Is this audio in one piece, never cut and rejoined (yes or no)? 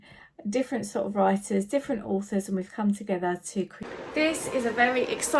no